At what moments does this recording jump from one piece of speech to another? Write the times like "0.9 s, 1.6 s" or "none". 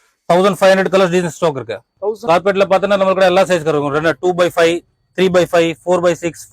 2.2 s